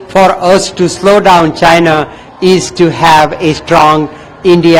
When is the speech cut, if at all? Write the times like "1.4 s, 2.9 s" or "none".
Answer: none